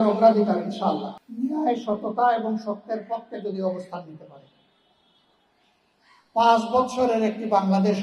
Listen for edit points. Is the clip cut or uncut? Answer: cut